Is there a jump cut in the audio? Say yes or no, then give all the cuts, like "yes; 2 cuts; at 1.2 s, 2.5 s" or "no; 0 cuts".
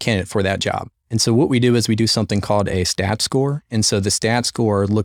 yes; 1 cut; at 0.9 s